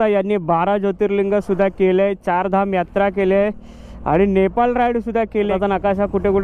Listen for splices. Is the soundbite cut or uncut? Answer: cut